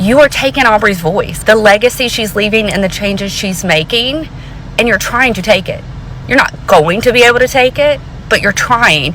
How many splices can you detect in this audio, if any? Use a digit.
1